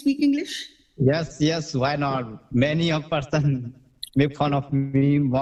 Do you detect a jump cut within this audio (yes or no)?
no